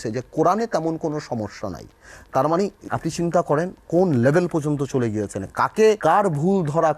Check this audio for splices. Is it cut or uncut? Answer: cut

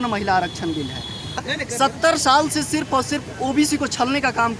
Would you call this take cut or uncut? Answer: cut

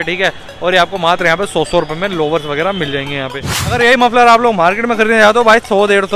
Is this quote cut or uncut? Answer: cut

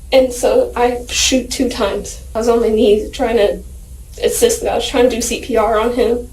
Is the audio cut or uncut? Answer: cut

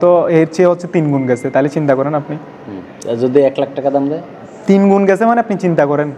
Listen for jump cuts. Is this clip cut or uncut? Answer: uncut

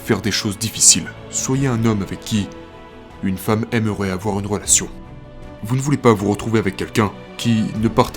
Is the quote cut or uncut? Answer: cut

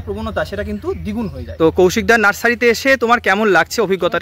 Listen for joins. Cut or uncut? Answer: cut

